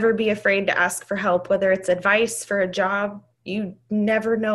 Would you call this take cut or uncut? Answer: uncut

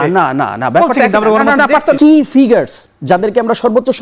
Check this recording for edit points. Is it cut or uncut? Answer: cut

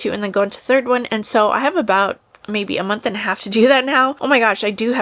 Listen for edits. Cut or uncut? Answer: cut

